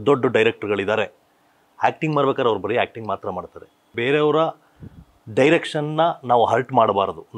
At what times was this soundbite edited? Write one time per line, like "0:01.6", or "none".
0:04.0